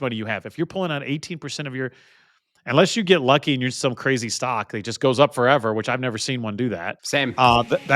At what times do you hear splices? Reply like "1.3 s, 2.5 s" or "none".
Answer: 7.0 s